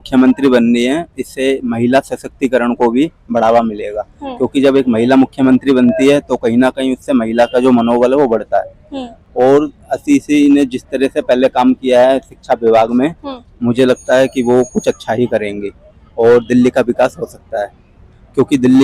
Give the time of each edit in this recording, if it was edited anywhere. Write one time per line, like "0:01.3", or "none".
none